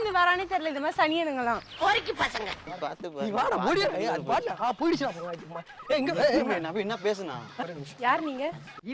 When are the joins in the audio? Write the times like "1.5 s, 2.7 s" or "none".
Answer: 2.7 s, 7.5 s